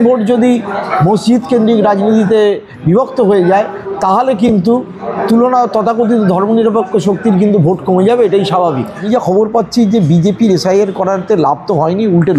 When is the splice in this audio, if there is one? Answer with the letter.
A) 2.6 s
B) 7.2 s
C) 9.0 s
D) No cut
C